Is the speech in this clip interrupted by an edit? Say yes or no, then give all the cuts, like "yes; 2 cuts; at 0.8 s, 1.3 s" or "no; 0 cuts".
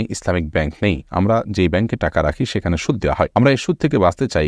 yes; 1 cut; at 3.3 s